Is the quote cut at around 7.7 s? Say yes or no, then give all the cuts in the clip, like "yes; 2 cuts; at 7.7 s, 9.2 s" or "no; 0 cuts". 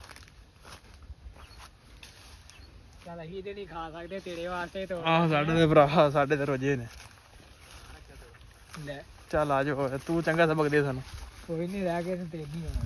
no; 0 cuts